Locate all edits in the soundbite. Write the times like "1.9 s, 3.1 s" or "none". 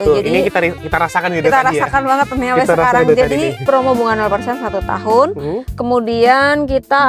3.6 s